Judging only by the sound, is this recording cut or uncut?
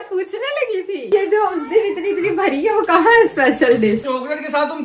cut